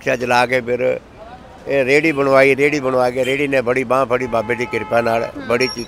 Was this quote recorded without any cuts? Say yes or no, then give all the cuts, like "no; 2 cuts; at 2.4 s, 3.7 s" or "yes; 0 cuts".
yes; 0 cuts